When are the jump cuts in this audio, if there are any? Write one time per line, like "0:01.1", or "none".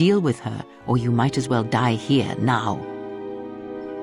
0:02.8